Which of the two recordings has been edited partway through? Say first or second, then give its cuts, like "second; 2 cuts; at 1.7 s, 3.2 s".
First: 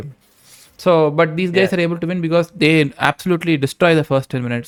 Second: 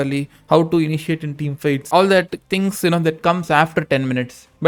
second; 1 cut; at 1.8 s